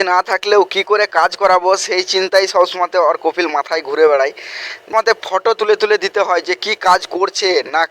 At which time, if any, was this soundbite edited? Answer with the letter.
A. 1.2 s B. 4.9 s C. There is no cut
B